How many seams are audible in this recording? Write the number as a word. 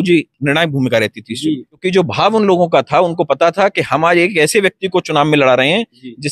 one